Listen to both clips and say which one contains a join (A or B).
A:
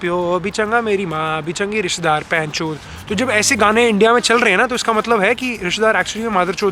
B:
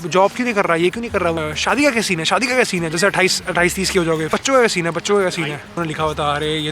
B